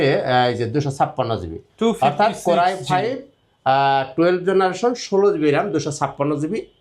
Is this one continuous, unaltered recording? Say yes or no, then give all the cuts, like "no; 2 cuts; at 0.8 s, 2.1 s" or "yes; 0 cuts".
yes; 0 cuts